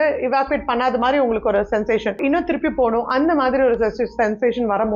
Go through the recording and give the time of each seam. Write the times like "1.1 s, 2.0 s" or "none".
2.2 s